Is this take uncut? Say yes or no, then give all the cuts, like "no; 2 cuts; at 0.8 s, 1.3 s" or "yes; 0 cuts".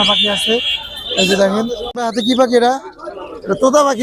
no; 1 cut; at 1.8 s